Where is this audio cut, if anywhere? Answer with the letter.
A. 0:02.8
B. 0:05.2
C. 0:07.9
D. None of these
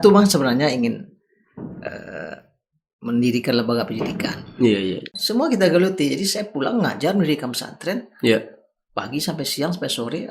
B